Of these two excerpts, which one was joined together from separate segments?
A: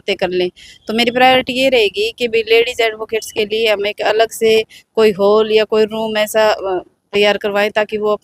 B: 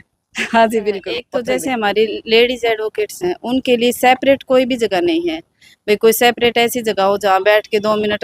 B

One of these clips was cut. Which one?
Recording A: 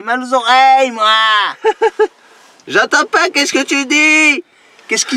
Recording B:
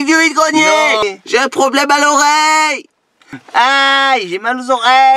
B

